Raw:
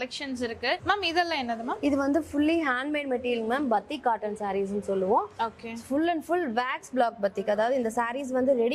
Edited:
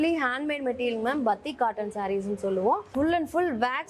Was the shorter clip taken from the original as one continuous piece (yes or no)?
no